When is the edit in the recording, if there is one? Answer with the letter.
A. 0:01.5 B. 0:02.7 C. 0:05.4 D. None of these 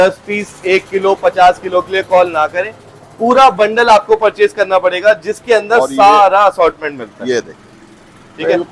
D